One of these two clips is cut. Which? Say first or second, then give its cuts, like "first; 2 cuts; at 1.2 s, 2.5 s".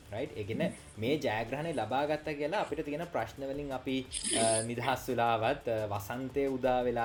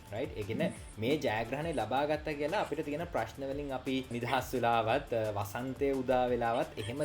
second; 1 cut; at 4.1 s